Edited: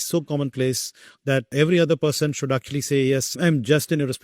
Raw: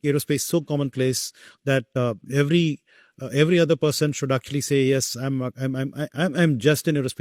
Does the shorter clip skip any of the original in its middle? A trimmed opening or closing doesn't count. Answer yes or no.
yes